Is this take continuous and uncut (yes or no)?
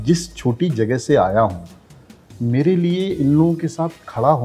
yes